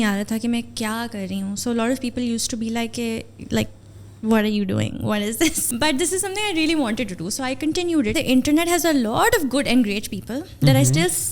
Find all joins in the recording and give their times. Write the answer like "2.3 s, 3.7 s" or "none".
5.6 s, 8.2 s